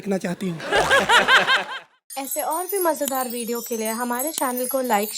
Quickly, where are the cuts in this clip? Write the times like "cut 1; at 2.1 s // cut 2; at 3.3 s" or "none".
cut 1; at 1.6 s